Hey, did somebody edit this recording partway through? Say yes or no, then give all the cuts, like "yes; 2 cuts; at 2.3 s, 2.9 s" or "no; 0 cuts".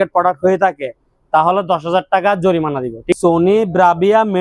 yes; 1 cut; at 3.1 s